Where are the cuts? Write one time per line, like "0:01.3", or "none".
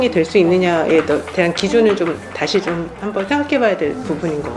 none